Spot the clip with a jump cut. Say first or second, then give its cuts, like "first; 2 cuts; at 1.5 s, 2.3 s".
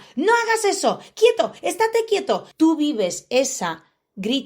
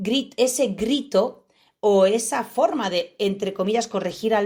first; 1 cut; at 2.5 s